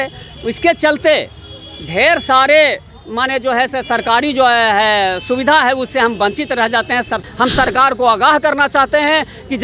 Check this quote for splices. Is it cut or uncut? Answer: cut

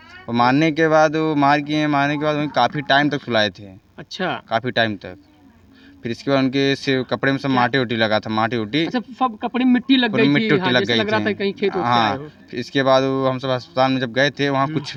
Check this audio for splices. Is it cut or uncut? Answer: uncut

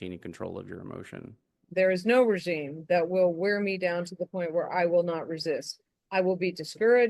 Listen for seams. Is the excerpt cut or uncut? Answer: cut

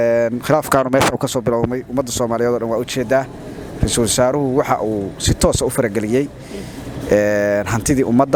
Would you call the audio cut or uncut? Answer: uncut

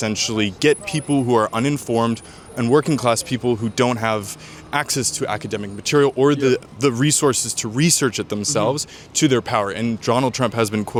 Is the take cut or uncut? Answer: uncut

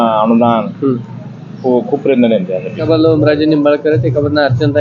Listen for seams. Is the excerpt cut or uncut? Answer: cut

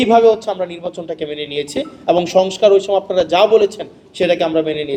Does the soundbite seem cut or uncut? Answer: uncut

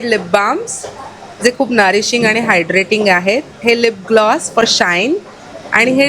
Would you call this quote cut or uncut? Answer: uncut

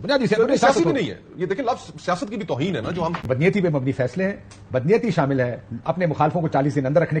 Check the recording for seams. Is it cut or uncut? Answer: cut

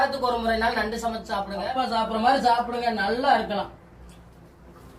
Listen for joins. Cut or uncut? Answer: cut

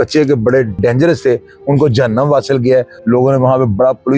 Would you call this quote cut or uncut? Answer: cut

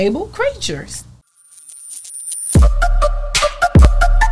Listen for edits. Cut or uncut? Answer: cut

